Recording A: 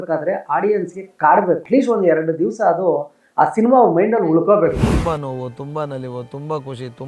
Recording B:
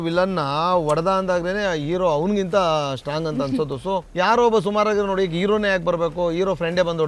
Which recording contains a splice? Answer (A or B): A